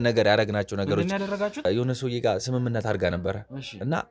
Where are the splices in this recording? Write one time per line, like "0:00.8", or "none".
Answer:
0:01.6